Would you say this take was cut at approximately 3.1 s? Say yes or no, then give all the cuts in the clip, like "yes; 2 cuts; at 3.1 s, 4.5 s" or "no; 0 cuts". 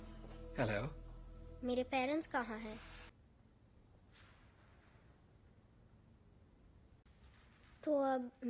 yes; 1 cut; at 3.1 s